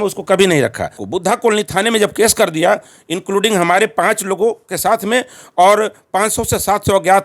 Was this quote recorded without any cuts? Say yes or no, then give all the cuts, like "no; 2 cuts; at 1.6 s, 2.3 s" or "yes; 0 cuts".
no; 1 cut; at 1.0 s